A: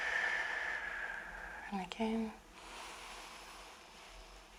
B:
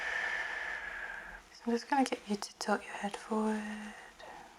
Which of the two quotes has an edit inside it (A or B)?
B